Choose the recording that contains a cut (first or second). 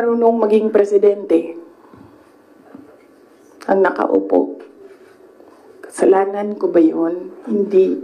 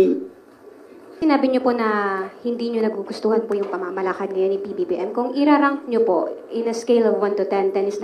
second